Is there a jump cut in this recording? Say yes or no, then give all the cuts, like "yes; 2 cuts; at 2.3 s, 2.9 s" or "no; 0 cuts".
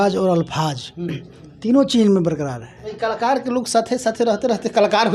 yes; 1 cut; at 2.8 s